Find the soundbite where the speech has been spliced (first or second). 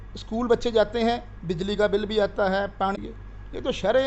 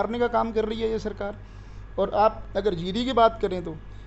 first